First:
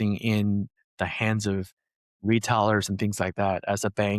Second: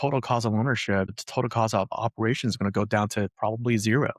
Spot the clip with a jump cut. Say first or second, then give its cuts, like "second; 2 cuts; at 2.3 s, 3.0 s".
second; 1 cut; at 1.2 s